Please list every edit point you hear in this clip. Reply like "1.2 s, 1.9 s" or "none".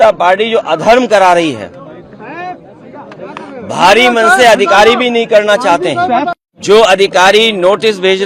6.3 s

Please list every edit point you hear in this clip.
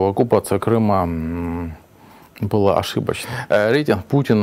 3.3 s

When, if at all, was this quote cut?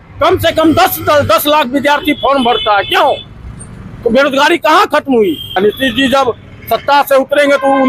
5.6 s

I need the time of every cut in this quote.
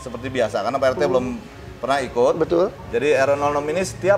none

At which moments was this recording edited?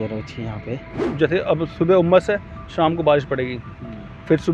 1.0 s

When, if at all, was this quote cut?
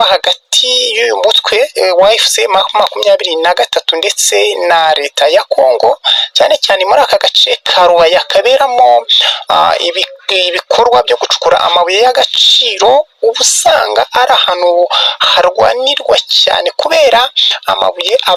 none

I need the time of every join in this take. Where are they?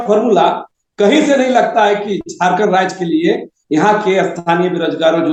none

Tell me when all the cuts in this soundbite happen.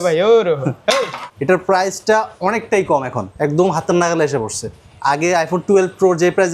1.3 s, 3.2 s

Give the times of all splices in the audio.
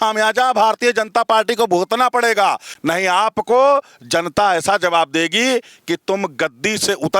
2.7 s

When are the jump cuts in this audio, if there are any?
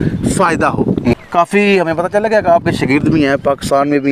1.2 s

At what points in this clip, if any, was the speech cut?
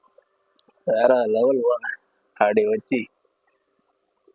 none

